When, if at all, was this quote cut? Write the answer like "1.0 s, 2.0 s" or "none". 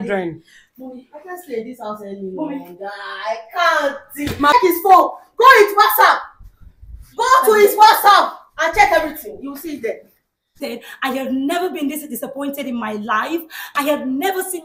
4.5 s, 10.6 s